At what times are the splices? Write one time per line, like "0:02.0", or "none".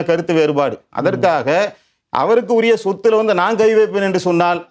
none